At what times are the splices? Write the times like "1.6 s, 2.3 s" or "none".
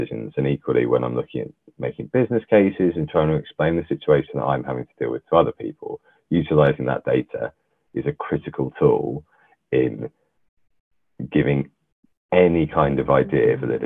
none